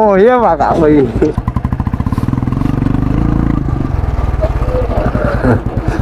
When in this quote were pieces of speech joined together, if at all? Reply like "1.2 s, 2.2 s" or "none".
1.4 s